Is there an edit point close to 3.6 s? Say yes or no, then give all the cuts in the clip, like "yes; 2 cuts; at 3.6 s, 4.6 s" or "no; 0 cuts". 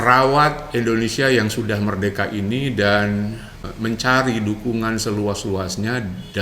yes; 1 cut; at 3.6 s